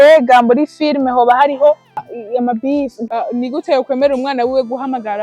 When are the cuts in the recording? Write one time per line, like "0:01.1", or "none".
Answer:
0:02.1
0:03.0